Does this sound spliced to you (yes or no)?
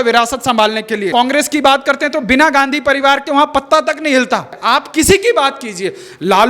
yes